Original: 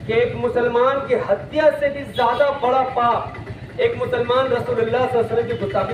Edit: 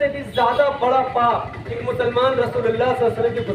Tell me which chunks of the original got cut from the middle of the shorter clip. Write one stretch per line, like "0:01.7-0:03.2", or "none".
0:03.7-0:04.0

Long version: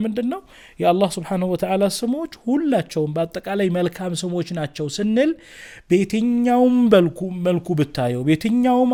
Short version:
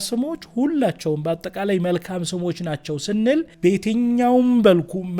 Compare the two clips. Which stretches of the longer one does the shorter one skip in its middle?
0:05.4-0:05.8

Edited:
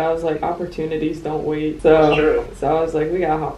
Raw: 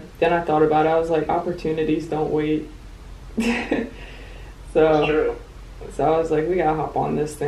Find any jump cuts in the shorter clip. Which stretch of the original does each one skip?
0:02.6-0:04.7
0:05.4-0:05.9

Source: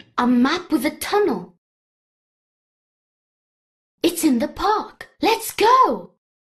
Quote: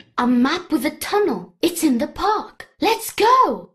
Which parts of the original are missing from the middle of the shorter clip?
0:01.5-0:03.9

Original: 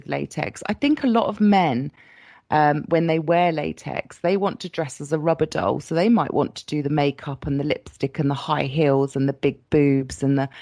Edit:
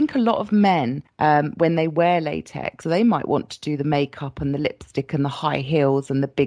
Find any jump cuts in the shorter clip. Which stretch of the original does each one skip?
0:01.9-0:02.3
0:04.1-0:05.8

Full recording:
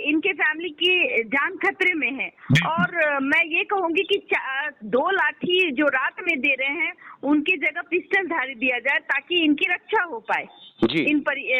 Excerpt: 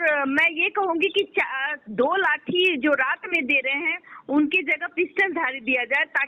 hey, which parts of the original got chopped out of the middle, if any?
none

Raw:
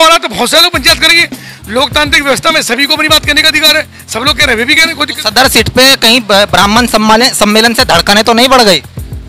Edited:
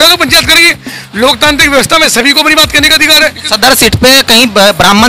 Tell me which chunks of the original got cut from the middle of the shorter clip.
0:04.0-0:05.2

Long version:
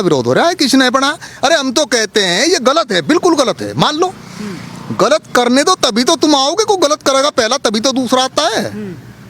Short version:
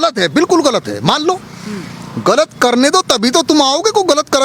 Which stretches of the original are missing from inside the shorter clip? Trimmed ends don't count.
none

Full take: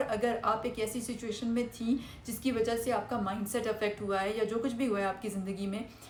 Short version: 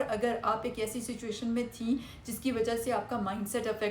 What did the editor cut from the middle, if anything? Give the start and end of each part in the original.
none

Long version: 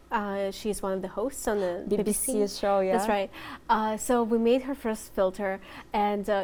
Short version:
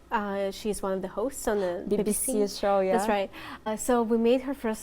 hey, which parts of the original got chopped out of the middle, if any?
0:03.6-0:03.8

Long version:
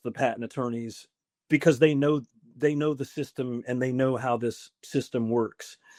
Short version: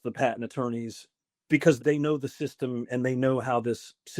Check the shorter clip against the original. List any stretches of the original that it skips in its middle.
0:01.8-0:02.5

